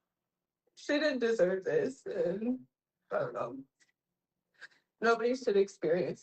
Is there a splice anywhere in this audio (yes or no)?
no